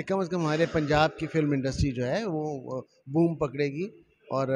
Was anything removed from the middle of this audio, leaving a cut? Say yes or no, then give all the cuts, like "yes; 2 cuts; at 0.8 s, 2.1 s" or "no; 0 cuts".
no; 0 cuts